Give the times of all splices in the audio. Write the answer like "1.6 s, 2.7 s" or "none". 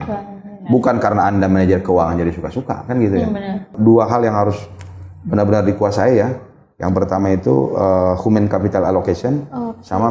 3.7 s